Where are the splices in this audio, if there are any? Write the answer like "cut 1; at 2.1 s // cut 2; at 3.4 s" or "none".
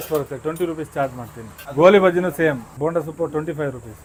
none